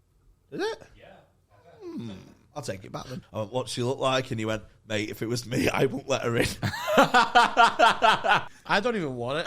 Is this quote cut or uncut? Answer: cut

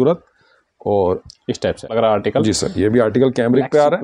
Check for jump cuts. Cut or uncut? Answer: cut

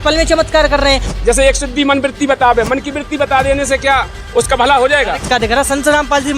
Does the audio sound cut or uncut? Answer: cut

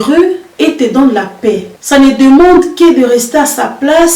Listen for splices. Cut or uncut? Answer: uncut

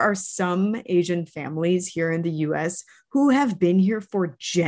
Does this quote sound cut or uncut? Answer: uncut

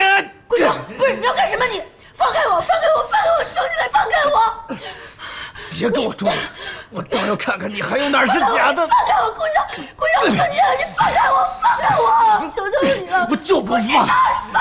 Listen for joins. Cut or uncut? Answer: cut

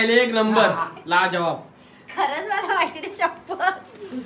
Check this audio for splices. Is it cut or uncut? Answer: uncut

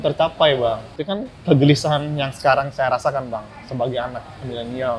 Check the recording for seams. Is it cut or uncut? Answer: cut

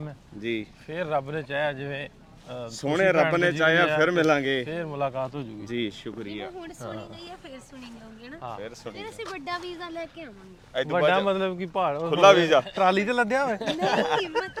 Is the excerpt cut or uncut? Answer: uncut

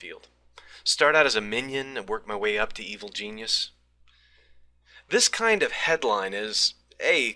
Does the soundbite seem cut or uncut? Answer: uncut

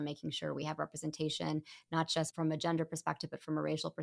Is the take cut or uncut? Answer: cut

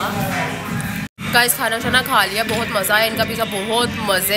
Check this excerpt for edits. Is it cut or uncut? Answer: cut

